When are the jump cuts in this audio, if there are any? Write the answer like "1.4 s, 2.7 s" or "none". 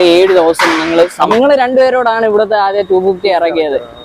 1.3 s